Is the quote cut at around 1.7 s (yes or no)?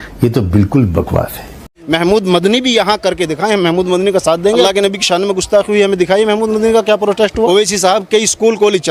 yes